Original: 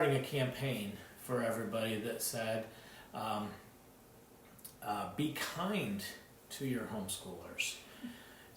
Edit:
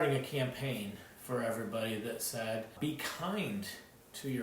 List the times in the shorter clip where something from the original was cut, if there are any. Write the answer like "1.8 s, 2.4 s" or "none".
2.7 s